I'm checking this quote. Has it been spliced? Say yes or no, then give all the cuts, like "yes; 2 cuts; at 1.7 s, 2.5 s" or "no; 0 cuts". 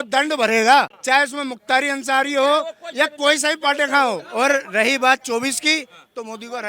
yes; 2 cuts; at 1.0 s, 4.3 s